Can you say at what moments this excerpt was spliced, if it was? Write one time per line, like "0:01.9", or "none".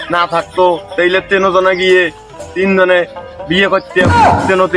none